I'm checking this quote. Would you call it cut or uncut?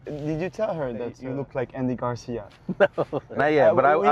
cut